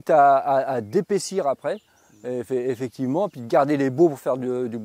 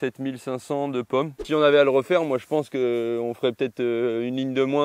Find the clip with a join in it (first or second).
second